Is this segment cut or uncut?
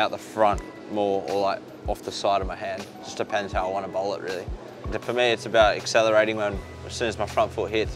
cut